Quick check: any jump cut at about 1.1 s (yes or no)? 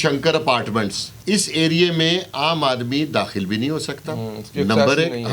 yes